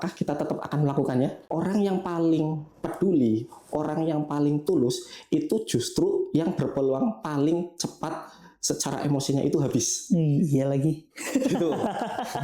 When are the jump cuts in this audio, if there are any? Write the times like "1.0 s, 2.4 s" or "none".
1.4 s